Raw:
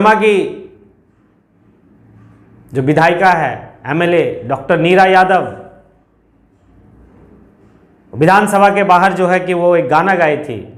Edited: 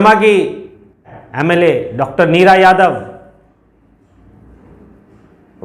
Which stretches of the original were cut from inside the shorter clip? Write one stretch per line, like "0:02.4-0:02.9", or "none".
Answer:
0:01.2-0:03.7